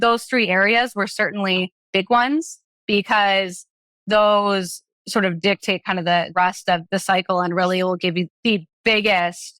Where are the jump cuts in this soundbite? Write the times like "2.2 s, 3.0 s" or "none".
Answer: 8.3 s